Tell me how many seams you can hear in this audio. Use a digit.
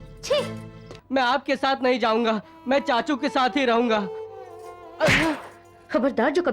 1